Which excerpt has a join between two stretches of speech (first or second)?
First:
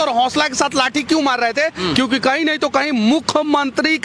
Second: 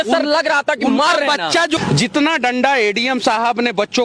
second